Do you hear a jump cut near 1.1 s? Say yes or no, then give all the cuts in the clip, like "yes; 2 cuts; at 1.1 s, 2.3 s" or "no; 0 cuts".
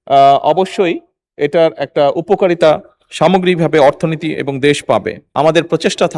no; 1 cut; at 5.2 s